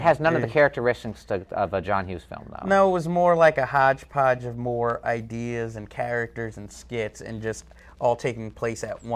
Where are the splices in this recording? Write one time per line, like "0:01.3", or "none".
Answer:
0:07.0